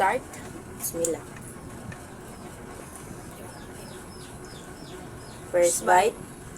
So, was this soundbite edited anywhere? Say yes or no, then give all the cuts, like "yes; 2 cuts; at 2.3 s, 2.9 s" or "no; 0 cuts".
yes; 1 cut; at 2.8 s